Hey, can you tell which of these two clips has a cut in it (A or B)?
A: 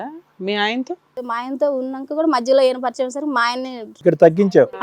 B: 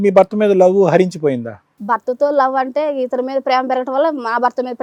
A